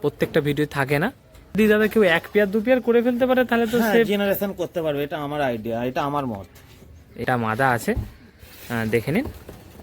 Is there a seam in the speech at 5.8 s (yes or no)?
no